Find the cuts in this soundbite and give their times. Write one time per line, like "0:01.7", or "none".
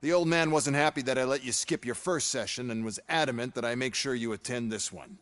0:02.0